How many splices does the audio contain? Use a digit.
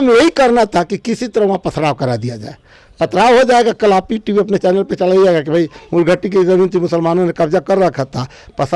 0